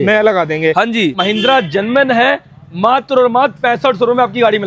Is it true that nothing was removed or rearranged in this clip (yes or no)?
no